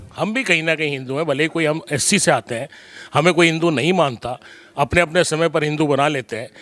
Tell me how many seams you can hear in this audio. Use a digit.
0